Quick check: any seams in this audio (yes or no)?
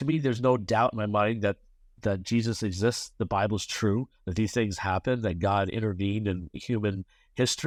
no